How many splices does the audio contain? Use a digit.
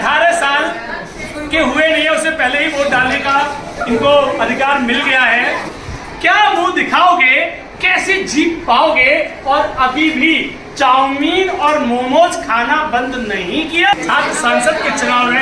2